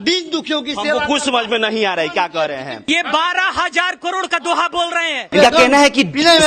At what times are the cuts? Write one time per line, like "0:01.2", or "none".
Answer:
0:02.8
0:05.3